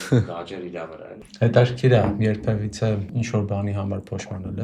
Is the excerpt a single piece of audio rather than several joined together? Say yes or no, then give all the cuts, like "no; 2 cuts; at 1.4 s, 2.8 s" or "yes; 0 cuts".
no; 2 cuts; at 1.2 s, 3.1 s